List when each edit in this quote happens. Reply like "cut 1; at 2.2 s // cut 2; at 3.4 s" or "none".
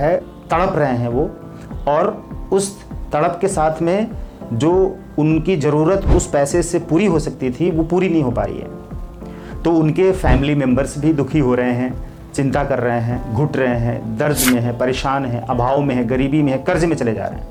none